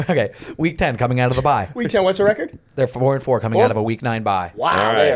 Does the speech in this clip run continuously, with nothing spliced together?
yes; 0 cuts

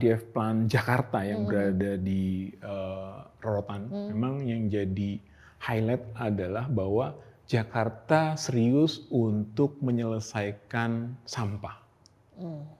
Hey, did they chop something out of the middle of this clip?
no; 0 cuts

